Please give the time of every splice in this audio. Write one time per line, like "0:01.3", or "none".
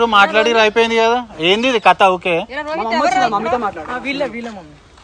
none